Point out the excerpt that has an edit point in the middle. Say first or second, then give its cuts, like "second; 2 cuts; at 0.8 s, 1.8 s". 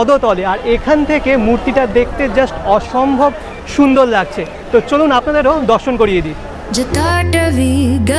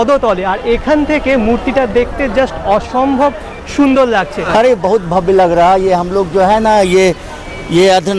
second; 1 cut; at 4.4 s